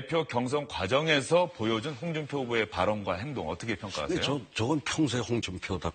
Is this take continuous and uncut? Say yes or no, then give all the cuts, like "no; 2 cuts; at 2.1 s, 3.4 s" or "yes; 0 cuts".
yes; 0 cuts